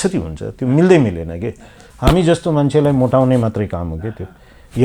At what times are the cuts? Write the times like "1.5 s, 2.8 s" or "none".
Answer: 1.8 s